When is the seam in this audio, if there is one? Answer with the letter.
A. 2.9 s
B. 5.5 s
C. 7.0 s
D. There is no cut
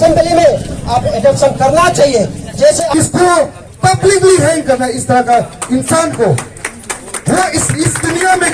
A